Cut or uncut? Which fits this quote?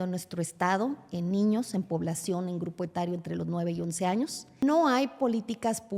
cut